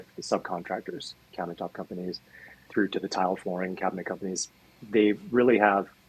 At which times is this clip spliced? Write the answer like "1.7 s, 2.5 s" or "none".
2.6 s, 4.7 s